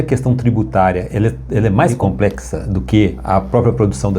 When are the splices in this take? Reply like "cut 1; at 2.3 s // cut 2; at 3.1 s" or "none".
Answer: cut 1; at 1.9 s // cut 2; at 3.2 s